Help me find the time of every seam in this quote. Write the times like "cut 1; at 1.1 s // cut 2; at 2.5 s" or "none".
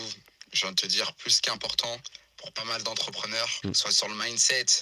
cut 1; at 3.5 s